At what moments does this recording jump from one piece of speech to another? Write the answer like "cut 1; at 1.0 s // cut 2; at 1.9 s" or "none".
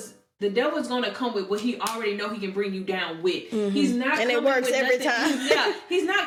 none